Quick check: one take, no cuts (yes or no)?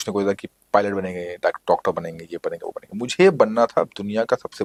yes